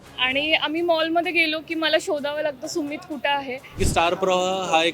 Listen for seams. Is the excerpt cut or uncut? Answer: cut